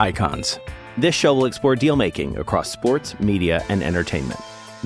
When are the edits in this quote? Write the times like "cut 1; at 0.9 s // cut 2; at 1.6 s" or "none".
none